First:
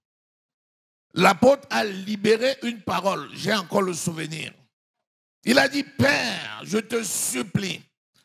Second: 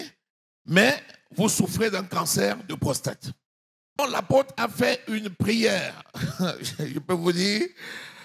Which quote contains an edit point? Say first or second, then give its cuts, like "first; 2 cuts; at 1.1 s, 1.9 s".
second; 1 cut; at 4.0 s